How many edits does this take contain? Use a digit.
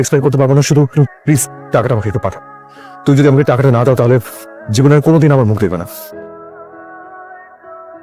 0